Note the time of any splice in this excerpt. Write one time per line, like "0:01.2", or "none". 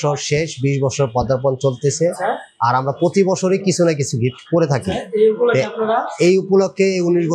none